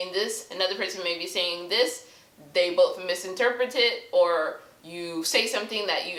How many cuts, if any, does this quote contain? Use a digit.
0